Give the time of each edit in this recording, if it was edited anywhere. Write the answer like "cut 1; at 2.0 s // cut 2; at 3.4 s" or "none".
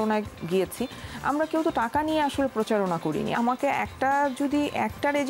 cut 1; at 3.3 s